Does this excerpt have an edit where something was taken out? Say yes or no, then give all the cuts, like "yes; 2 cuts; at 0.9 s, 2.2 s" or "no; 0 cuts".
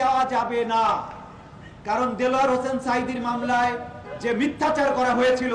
no; 0 cuts